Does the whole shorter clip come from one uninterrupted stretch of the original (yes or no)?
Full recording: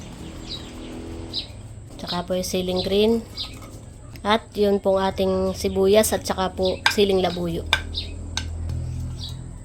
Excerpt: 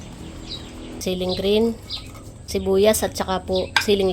no